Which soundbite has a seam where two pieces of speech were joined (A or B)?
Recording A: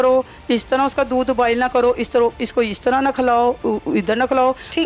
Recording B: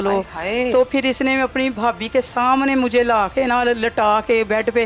B